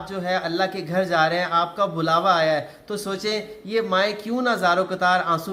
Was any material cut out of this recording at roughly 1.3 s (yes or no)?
no